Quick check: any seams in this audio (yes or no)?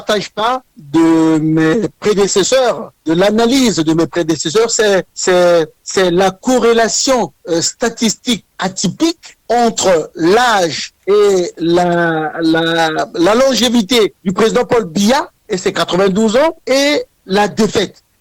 no